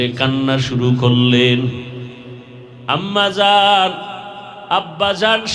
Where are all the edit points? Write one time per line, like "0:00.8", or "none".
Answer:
none